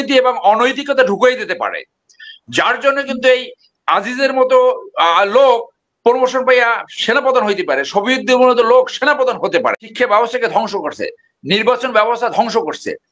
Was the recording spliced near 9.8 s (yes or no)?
yes